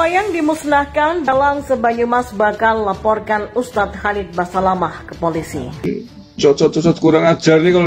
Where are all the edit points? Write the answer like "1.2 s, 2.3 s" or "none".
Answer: 1.3 s, 5.9 s